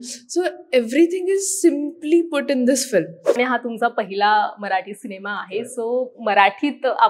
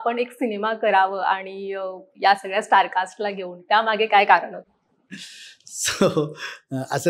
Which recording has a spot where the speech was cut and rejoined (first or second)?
first